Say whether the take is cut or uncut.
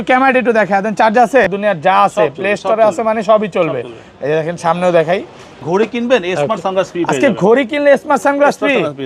cut